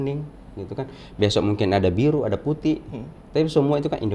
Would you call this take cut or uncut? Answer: uncut